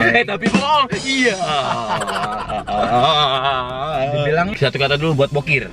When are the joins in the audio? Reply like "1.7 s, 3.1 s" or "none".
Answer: 4.5 s